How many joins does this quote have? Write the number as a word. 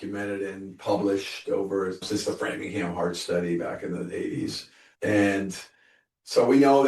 one